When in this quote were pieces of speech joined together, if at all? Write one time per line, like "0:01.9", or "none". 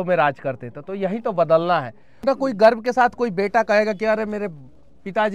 0:02.2

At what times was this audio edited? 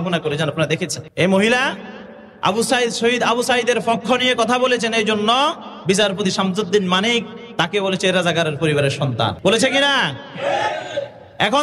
0:01.0
0:09.4

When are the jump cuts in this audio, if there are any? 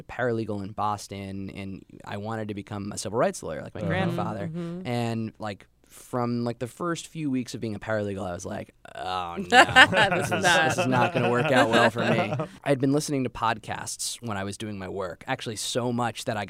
none

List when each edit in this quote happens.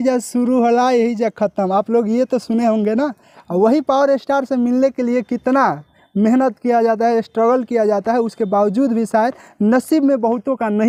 none

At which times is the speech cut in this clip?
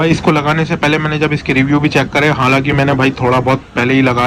none

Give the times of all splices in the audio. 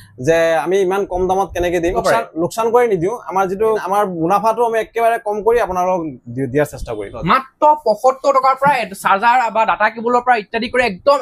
0:02.0
0:03.8
0:07.1

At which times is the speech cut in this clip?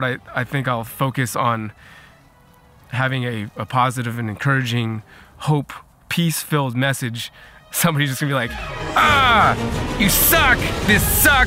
none

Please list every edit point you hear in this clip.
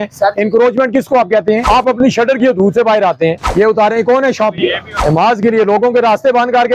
0:01.6
0:03.4
0:04.9

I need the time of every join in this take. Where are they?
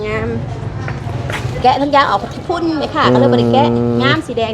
0:01.5

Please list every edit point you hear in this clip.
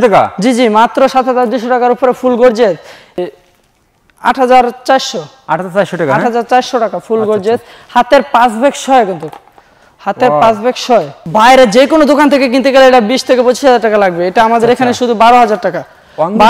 0:03.2
0:11.2

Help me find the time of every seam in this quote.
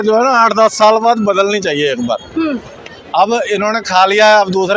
none

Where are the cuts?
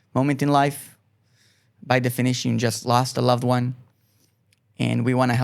none

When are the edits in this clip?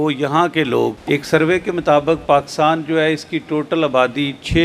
0:01.0

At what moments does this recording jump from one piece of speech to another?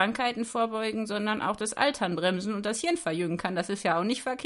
none

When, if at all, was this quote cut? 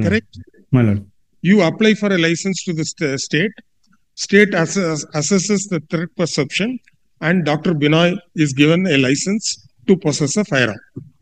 none

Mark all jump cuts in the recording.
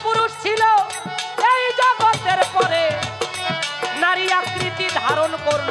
none

